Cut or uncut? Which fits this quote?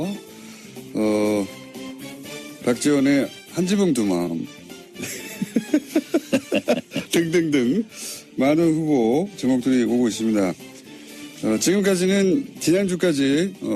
uncut